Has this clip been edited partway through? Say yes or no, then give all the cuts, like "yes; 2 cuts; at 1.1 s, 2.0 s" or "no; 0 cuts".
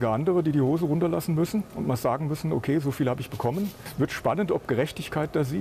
yes; 1 cut; at 3.8 s